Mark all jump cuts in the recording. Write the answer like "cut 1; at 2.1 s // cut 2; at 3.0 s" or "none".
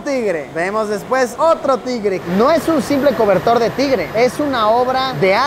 cut 1; at 2.2 s